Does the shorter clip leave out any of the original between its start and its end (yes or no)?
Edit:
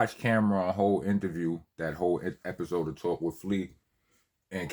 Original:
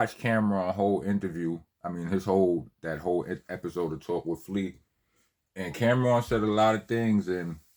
yes